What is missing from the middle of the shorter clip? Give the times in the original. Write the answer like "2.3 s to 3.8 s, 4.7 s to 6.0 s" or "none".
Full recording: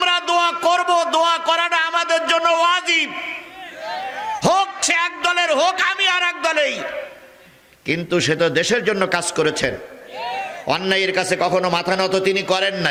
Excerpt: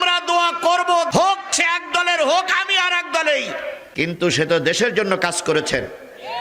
1.1 s to 4.4 s, 7.1 s to 7.7 s